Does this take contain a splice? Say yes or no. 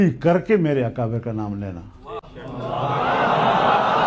no